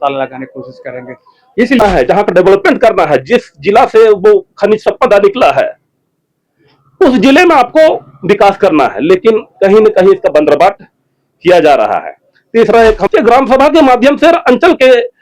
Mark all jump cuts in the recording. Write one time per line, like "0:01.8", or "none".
0:01.8
0:13.0